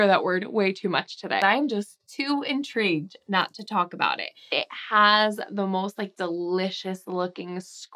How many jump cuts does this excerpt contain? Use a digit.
2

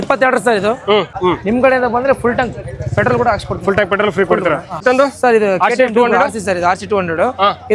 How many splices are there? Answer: 2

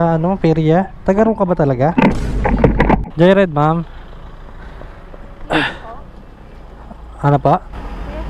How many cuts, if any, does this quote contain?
1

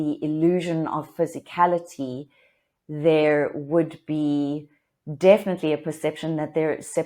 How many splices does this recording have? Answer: 0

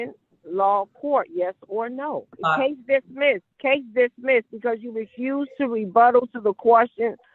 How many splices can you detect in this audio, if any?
2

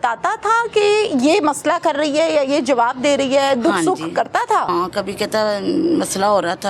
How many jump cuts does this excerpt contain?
1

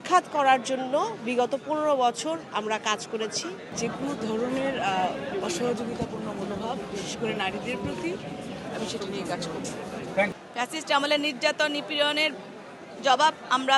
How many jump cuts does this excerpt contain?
2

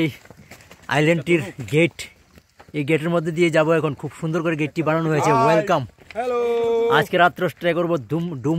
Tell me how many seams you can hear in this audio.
0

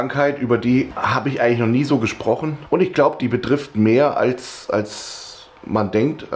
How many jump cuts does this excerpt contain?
0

